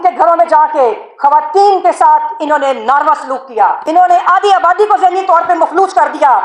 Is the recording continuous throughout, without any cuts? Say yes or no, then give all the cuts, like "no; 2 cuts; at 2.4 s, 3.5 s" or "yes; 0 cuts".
no; 1 cut; at 3.8 s